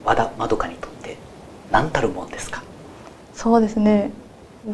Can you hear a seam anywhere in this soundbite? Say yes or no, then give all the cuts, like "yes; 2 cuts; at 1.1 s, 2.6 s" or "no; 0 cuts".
no; 0 cuts